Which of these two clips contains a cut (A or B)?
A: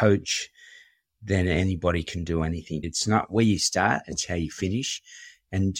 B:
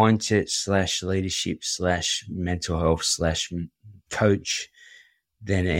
A